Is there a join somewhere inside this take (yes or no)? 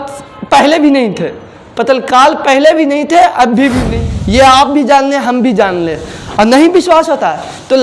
yes